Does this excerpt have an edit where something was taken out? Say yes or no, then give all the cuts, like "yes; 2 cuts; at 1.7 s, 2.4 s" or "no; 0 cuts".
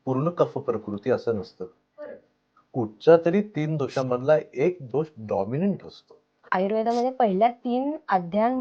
yes; 1 cut; at 6.4 s